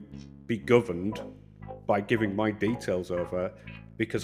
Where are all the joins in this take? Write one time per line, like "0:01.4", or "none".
none